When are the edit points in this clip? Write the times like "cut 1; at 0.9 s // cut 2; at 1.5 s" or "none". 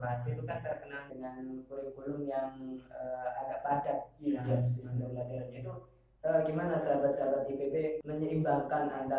cut 1; at 1.1 s // cut 2; at 8.1 s